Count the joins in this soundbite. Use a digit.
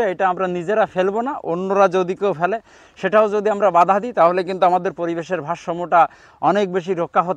0